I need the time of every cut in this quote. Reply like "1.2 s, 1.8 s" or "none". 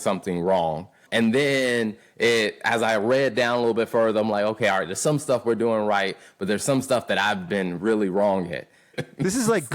8.8 s